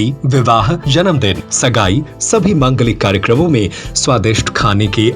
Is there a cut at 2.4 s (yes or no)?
no